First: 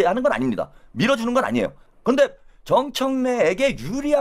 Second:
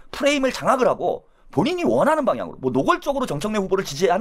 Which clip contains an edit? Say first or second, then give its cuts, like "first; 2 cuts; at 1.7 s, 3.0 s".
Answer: first; 1 cut; at 1.9 s